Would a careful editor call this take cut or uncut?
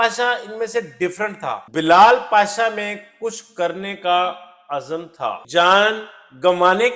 cut